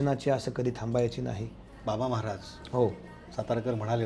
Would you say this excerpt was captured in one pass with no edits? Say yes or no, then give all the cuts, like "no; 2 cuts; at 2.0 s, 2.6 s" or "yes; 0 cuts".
no; 1 cut; at 1.8 s